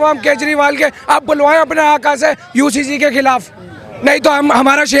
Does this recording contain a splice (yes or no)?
no